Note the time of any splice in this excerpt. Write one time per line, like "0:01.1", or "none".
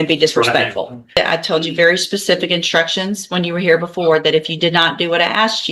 0:01.2